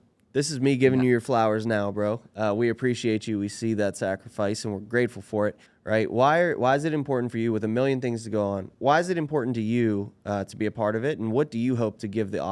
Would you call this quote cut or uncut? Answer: cut